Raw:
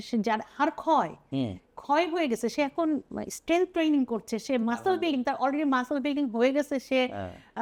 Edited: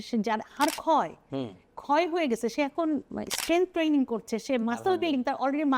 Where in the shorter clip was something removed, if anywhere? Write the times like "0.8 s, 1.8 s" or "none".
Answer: none